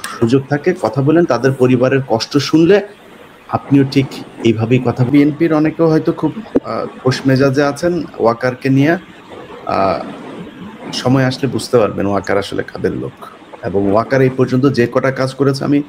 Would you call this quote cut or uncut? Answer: cut